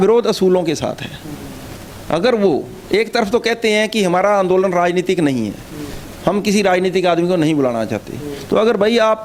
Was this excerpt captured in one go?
yes; 0 cuts

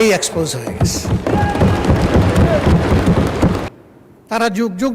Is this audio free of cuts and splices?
no; 1 cut; at 3.6 s

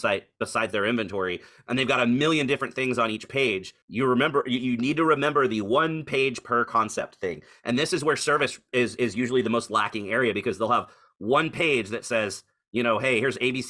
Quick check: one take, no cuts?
no; 1 cut; at 3.8 s

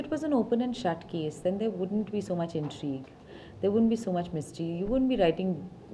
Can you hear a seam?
no; 0 cuts

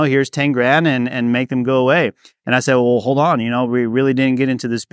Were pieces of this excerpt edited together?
no; 0 cuts

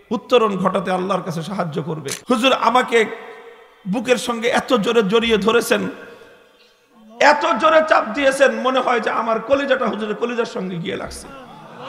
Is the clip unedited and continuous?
no; 1 cut; at 2.1 s

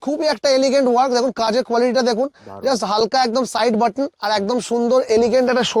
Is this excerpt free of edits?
yes; 0 cuts

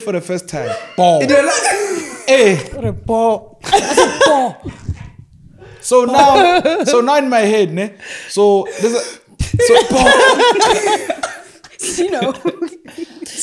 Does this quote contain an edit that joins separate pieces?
no; 0 cuts

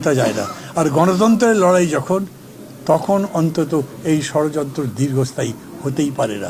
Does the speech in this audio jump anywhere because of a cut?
no; 0 cuts

